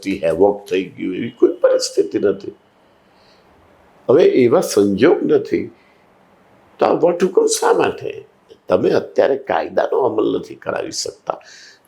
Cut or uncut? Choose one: cut